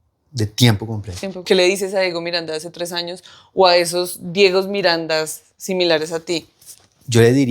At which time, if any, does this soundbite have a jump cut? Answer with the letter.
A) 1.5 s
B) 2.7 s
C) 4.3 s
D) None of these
A